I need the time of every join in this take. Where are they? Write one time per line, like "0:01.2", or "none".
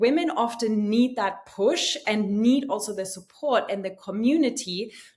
none